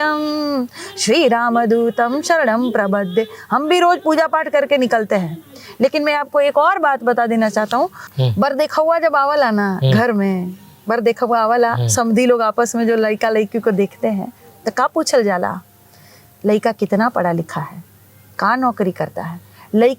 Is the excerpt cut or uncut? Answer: uncut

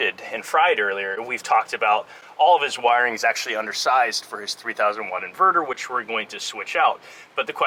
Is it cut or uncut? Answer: uncut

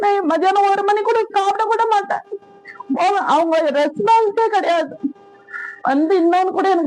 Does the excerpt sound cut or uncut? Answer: uncut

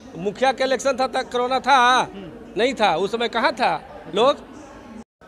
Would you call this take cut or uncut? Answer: uncut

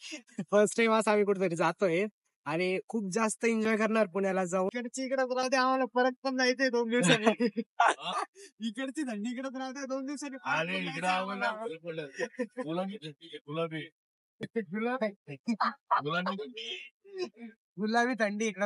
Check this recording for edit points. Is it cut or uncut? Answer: cut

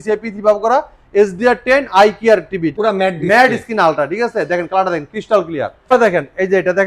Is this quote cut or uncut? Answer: cut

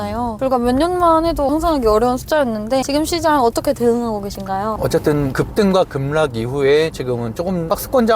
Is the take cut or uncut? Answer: cut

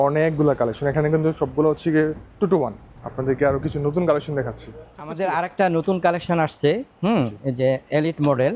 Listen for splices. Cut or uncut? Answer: uncut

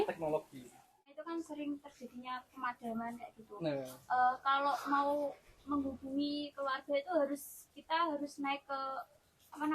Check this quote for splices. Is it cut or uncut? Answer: cut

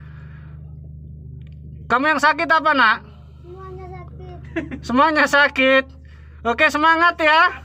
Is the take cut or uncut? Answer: uncut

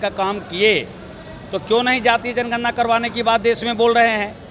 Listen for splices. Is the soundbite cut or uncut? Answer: uncut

